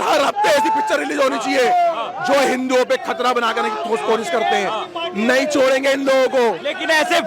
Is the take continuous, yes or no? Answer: yes